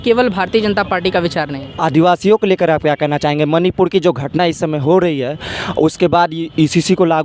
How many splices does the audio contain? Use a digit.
1